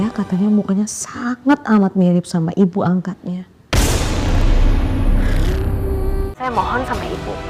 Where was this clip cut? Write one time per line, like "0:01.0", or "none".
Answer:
0:06.4